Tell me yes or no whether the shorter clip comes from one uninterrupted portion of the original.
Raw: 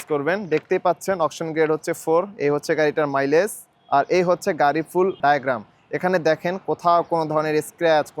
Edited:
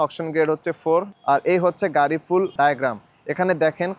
no